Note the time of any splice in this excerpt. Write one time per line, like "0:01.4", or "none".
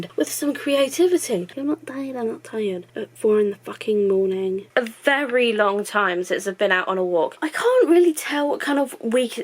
0:01.5
0:04.6
0:07.4

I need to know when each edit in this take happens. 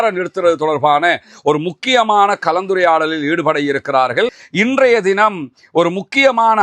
0:04.4

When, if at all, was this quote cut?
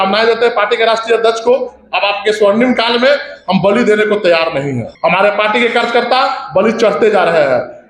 none

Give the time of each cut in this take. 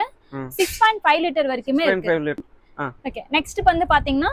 0:02.4

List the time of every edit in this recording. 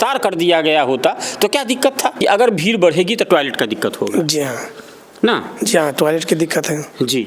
0:02.1

